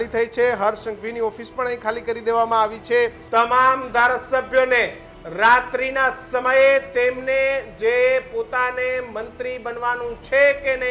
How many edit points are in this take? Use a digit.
1